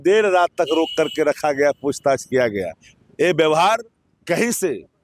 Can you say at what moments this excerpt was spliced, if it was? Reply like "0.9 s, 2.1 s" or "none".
none